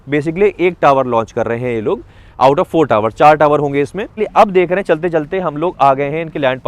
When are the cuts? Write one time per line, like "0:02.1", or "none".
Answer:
0:04.1